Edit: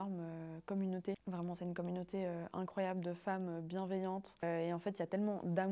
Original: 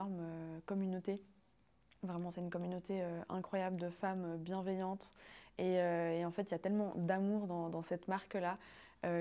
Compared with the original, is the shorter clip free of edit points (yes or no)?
no